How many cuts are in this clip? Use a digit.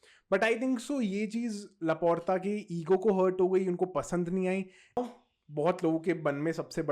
1